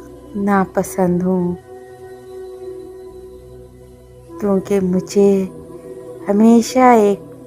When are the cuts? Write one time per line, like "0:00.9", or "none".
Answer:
none